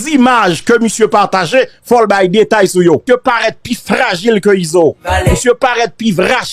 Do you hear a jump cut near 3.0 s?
yes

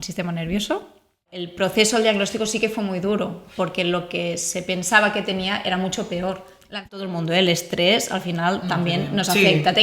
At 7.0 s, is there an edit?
yes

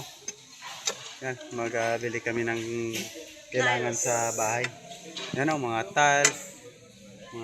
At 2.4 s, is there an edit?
no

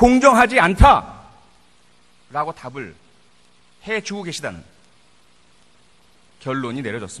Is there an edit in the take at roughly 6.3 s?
no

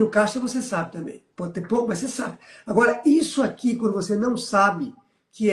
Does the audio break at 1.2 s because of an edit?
yes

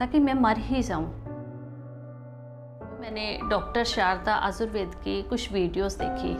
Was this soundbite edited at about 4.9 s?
no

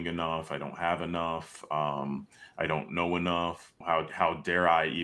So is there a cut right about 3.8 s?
yes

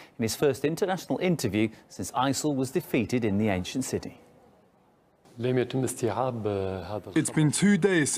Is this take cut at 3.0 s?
no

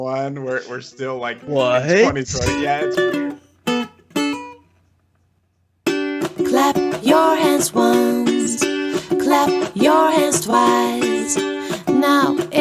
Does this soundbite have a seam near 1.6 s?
no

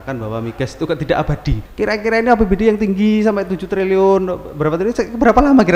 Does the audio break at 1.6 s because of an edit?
yes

